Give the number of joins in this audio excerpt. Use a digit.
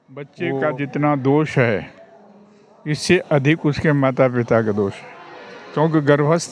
0